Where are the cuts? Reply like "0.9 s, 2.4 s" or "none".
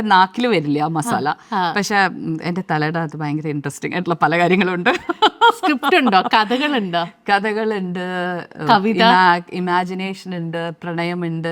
none